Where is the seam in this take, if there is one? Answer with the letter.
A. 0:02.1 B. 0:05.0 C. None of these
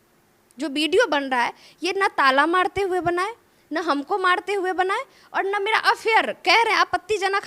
C